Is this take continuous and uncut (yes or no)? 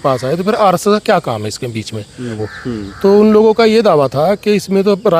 no